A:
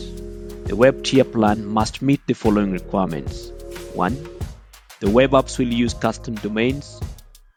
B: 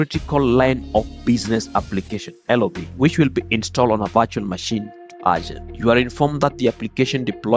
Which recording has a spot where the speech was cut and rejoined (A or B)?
B